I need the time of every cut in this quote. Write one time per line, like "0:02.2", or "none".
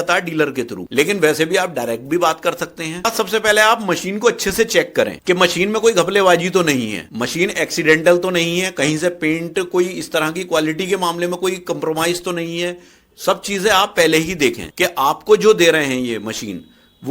0:03.1

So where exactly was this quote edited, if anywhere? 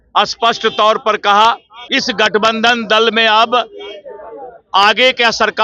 0:01.7

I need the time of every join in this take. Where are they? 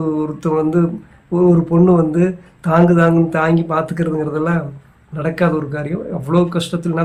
none

